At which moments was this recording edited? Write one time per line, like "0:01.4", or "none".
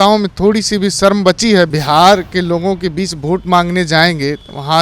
0:01.7